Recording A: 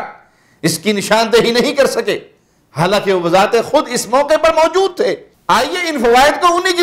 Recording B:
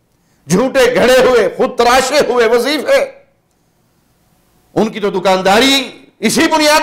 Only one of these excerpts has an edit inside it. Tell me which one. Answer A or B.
A